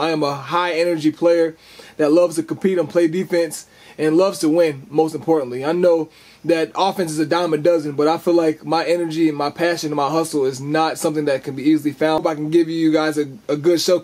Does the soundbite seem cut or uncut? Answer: cut